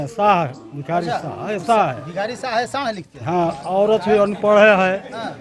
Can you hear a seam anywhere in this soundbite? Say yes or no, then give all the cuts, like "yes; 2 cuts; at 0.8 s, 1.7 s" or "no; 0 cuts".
no; 0 cuts